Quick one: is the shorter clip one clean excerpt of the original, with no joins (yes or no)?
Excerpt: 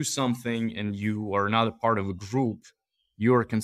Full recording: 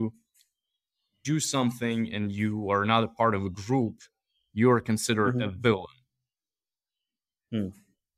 yes